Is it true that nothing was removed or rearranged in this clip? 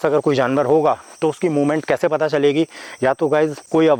yes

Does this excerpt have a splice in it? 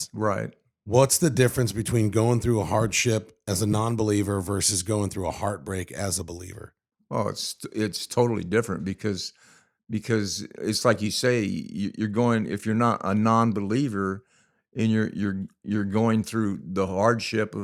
no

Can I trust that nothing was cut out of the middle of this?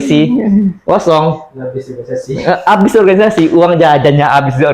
yes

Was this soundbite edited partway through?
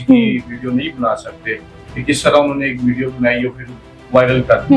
no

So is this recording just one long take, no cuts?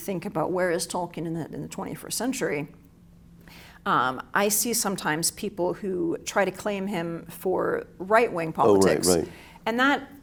yes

